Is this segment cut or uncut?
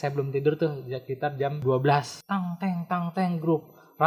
cut